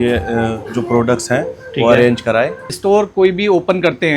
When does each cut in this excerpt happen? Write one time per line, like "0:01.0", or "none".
0:02.7

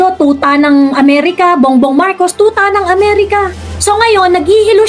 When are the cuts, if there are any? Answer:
0:03.6

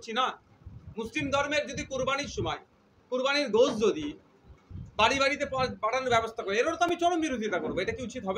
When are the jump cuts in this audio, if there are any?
none

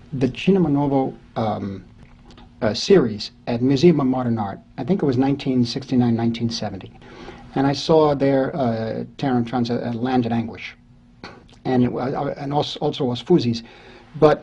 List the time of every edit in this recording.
0:01.9

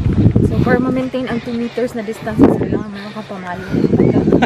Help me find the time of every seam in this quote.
none

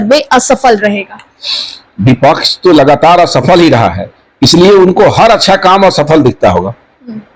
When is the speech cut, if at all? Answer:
none

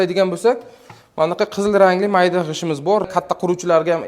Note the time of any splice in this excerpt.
0:03.0

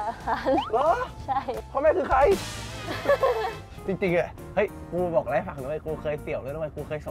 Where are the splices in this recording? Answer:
0:01.5
0:03.7

